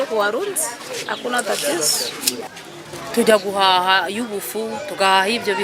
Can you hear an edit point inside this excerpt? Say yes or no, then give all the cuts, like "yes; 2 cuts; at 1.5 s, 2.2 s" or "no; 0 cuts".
no; 0 cuts